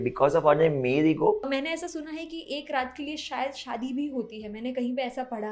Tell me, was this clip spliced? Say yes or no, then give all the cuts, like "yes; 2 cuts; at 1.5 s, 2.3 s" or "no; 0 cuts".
yes; 1 cut; at 1.5 s